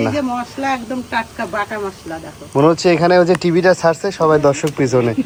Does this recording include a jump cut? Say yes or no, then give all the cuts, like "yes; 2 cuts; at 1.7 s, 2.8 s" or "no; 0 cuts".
no; 0 cuts